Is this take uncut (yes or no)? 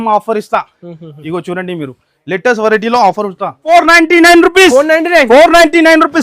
no